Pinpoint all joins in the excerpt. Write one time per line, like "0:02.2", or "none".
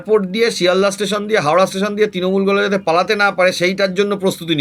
none